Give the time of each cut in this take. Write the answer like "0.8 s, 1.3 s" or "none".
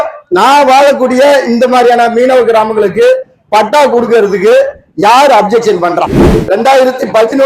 6.3 s